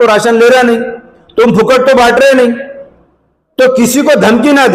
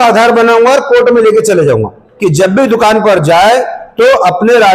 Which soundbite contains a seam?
second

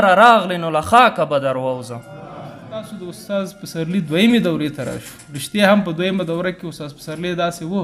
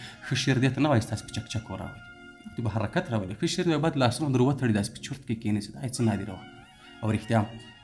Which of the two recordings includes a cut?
first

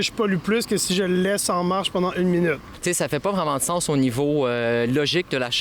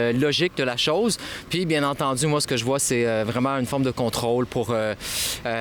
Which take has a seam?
first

